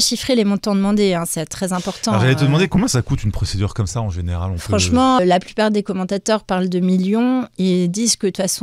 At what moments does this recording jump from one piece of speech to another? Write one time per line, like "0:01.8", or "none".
0:05.2

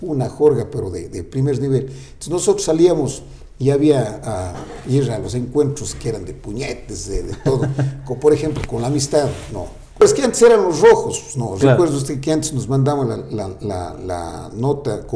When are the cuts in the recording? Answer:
0:10.0

